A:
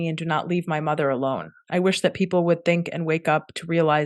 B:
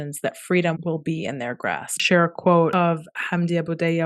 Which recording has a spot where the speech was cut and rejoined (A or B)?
B